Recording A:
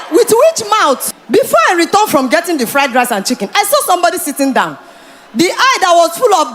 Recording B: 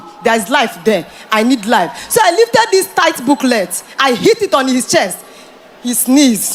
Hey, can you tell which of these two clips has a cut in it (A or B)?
A